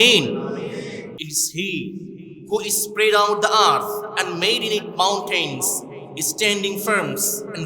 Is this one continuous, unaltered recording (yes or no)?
no